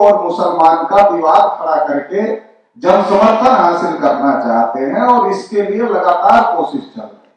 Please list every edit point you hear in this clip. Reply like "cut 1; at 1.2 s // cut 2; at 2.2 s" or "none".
none